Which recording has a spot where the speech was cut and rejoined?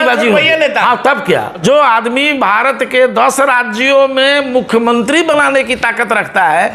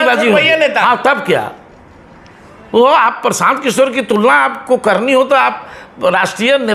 first; 1 cut; at 1.6 s

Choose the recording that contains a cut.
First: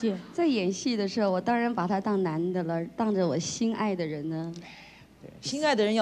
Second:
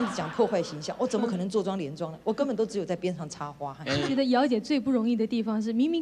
second; 1 cut; at 4.1 s

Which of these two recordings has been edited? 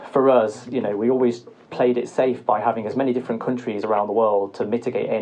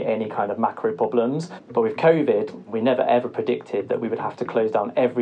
second; 2 cuts; at 1.5 s, 2.6 s

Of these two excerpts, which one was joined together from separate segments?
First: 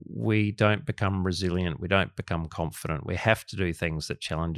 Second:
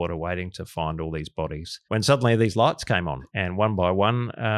second; 2 cuts; at 1.7 s, 3.2 s

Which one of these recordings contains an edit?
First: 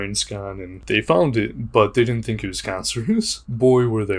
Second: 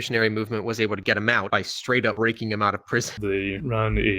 second; 1 cut; at 3.2 s

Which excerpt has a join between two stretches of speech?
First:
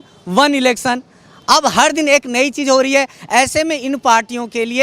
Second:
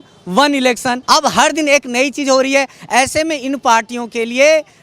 second; 1 cut; at 1.0 s

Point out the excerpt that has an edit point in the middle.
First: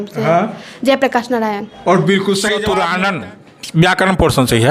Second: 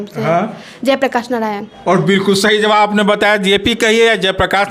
first; 1 cut; at 2.7 s

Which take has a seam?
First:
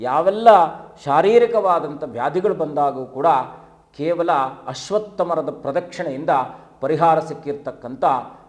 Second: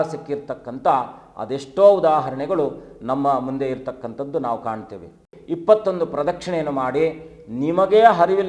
second; 1 cut; at 5.3 s

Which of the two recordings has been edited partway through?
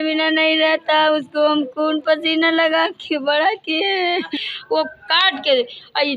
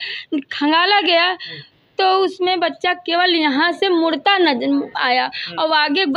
first; 1 cut; at 4.3 s

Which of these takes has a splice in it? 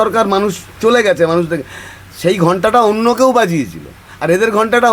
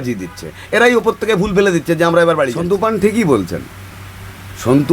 second; 1 cut; at 2.6 s

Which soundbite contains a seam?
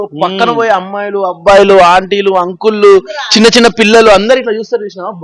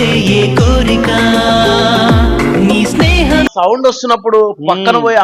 second; 1 cut; at 3.5 s

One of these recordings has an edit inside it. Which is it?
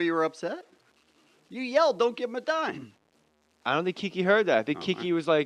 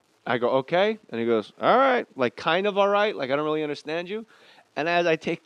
first; 1 cut; at 2.0 s

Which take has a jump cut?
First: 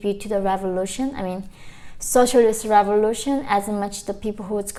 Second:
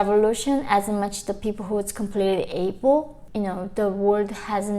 second; 1 cut; at 3.2 s

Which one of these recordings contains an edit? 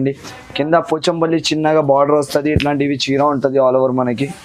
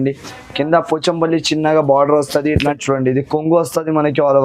second; 1 cut; at 2.7 s

